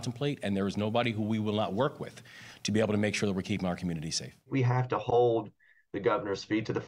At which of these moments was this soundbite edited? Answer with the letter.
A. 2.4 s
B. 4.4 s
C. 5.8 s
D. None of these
B